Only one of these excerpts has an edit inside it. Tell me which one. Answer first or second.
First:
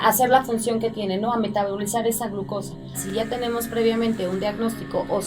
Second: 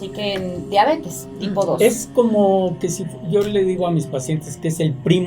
first